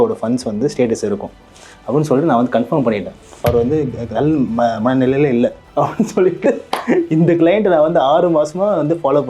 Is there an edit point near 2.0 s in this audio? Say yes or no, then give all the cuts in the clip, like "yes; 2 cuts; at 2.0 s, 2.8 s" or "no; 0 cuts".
no; 2 cuts; at 3.4 s, 5.6 s